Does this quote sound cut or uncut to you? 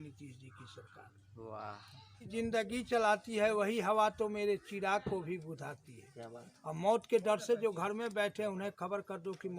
cut